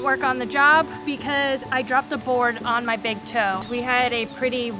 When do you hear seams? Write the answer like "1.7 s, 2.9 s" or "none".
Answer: 3.6 s